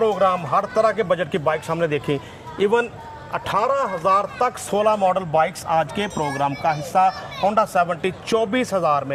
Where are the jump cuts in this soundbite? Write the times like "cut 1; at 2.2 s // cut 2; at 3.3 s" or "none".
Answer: none